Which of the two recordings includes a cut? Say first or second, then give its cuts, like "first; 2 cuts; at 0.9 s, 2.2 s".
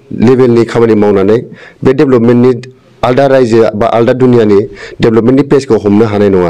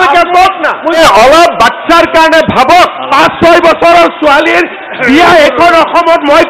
second; 1 cut; at 1.0 s